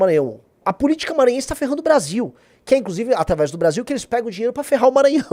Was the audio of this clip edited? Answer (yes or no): no